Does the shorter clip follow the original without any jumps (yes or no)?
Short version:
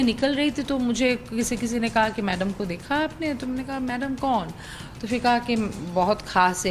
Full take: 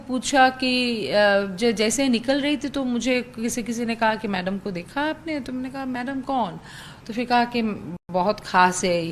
no